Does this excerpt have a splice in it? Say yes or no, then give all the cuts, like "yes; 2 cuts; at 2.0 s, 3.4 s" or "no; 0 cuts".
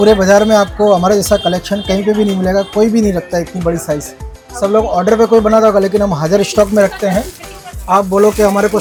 no; 0 cuts